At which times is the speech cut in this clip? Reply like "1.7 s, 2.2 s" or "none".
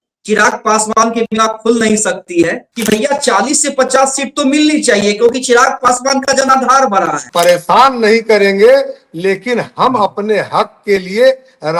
2.7 s, 7.3 s